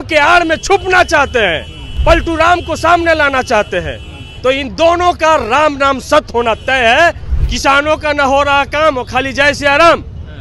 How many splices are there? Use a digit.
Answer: 2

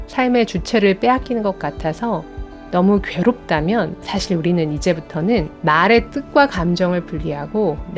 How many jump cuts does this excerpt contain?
2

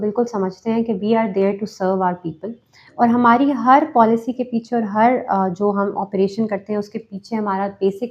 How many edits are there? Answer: 0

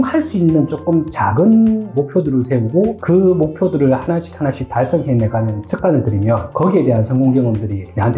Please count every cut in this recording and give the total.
0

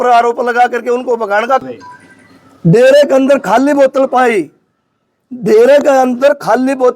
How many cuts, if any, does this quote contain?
1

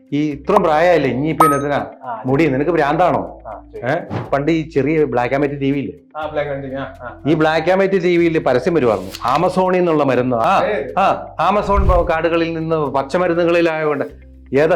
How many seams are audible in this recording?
2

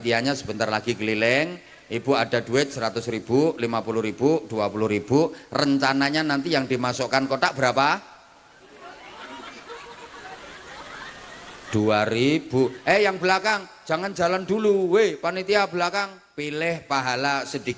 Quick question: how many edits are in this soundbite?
1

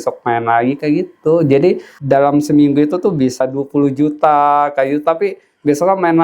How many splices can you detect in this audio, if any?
1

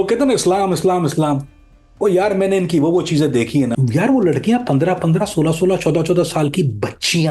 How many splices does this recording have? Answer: 1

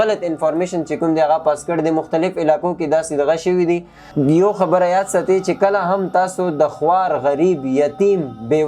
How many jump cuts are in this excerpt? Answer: 1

